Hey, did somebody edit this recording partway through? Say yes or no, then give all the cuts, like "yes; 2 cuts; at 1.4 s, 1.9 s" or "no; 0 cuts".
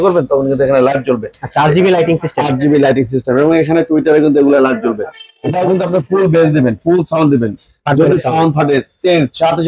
no; 0 cuts